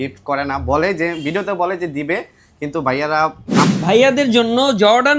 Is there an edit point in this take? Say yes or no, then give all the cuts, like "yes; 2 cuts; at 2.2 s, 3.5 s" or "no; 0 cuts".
yes; 1 cut; at 3.7 s